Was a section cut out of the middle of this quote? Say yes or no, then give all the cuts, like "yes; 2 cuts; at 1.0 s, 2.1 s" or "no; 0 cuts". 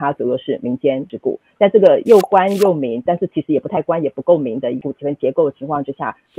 yes; 2 cuts; at 1.1 s, 4.8 s